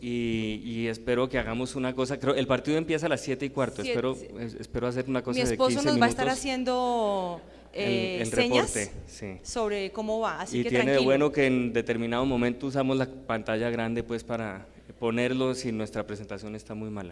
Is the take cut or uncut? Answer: uncut